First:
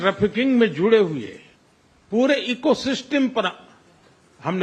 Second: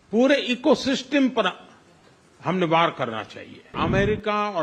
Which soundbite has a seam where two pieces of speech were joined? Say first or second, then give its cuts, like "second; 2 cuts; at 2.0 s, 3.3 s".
second; 1 cut; at 3.7 s